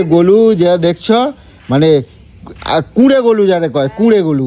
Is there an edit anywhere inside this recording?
no; 0 cuts

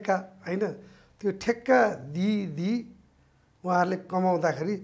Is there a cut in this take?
no; 0 cuts

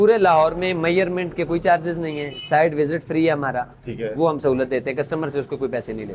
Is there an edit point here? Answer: no; 0 cuts

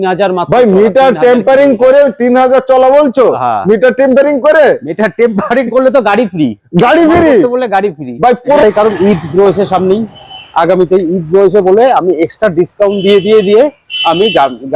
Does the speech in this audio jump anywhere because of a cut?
yes; 1 cut; at 8.6 s

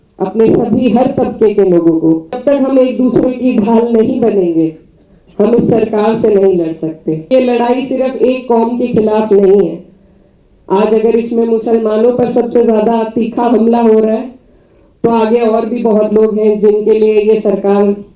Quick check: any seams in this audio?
yes; 2 cuts; at 2.4 s, 7.3 s

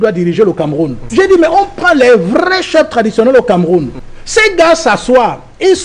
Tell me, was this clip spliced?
yes; 2 cuts; at 1.0 s, 4.0 s

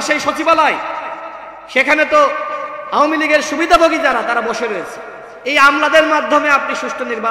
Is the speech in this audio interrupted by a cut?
no; 0 cuts

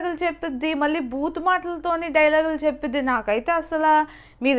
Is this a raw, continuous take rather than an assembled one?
yes; 0 cuts

